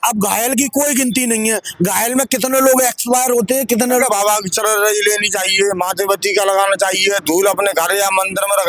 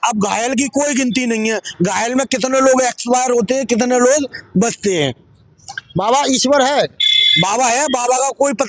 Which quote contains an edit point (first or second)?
first